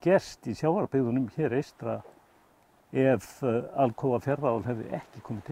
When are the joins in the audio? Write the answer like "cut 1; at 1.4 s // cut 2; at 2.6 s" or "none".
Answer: none